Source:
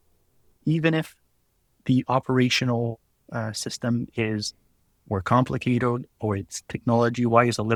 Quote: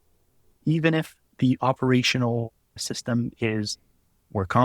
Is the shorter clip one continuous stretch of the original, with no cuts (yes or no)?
no